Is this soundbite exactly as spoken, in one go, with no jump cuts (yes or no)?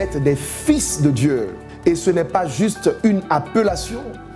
no